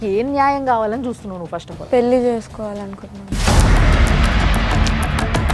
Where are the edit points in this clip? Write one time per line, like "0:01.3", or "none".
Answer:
none